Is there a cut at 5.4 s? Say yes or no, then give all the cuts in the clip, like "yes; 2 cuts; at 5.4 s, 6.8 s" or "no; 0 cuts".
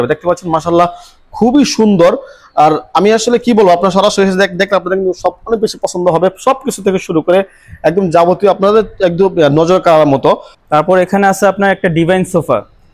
no; 1 cut; at 10.5 s